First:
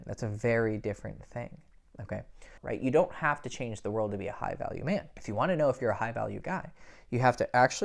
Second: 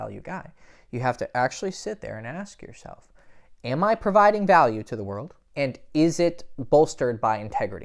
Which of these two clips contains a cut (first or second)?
first